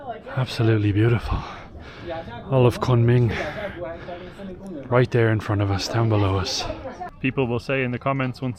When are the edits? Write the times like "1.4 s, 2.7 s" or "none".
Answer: 7.0 s